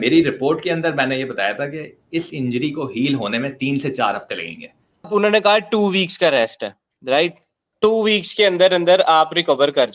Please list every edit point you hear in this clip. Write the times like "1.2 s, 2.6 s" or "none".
5.1 s